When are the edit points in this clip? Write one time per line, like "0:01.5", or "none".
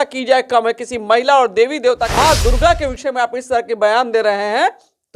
0:02.1

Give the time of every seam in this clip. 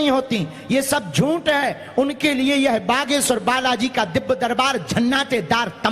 none

